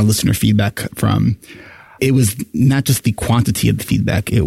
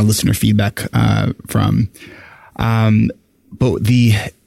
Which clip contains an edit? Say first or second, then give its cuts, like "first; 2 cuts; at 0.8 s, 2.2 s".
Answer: first; 2 cuts; at 0.9 s, 2.0 s